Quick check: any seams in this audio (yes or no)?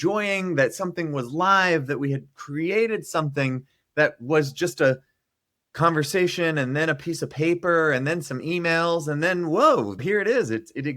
yes